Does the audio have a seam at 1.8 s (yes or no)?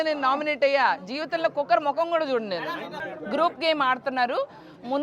no